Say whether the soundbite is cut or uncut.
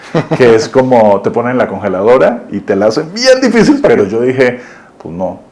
cut